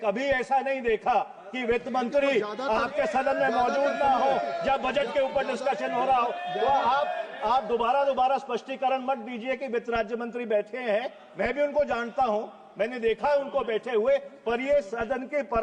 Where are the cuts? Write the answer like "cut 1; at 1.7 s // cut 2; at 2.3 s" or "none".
none